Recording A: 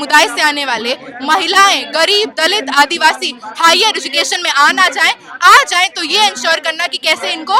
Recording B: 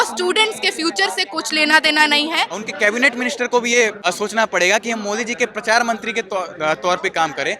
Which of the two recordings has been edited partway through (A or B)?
B